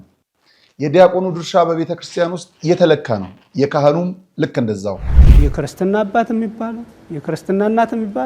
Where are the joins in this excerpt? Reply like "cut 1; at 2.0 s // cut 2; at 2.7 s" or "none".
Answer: cut 1; at 5.2 s